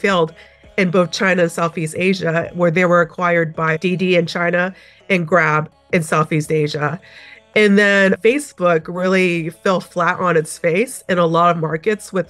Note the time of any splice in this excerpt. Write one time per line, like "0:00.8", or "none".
none

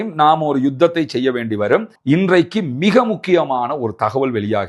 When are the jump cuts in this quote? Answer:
0:02.0

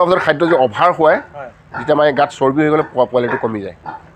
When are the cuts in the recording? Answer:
none

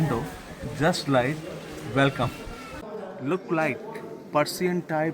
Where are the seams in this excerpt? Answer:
0:02.9

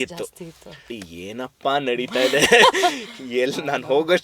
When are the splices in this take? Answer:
0:01.0

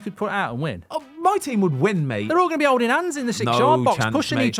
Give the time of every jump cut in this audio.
none

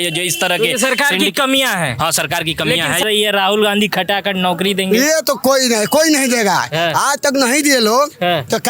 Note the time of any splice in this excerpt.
0:03.0

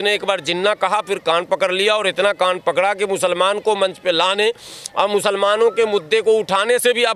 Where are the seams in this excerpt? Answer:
none

